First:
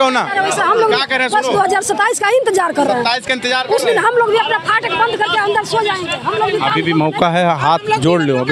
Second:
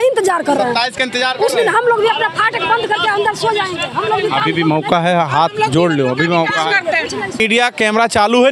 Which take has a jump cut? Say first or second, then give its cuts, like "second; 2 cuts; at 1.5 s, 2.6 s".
second; 1 cut; at 7.4 s